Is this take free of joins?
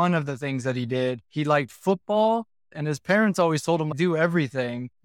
no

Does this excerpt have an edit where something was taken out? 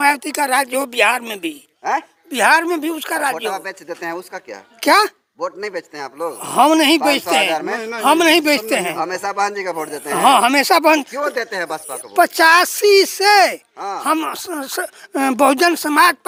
no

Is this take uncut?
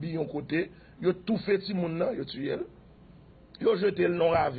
yes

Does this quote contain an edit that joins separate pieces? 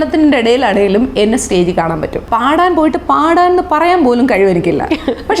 yes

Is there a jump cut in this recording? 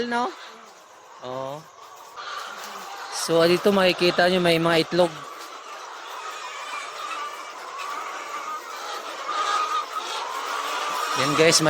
yes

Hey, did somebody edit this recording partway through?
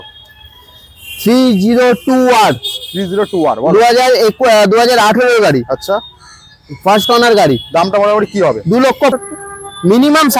yes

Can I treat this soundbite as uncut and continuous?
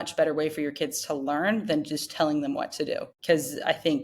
no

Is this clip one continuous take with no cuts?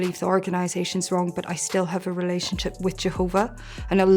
yes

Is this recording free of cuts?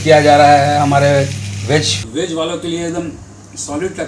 no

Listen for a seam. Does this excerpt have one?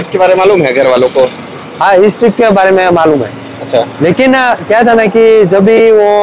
no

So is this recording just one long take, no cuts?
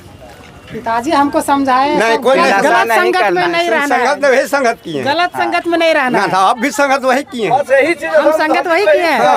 yes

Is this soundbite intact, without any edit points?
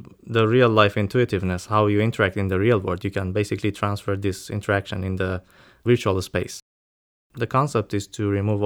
no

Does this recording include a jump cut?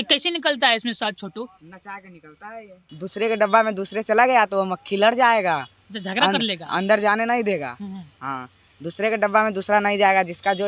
yes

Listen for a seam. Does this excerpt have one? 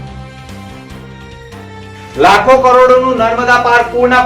yes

